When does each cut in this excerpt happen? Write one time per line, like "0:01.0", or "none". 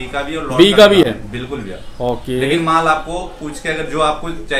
none